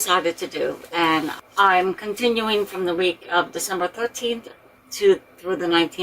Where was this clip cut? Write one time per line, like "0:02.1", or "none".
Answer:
0:01.3